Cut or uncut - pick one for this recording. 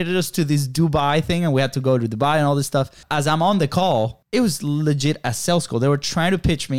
cut